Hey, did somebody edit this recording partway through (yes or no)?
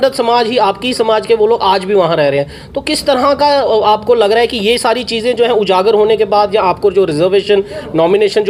no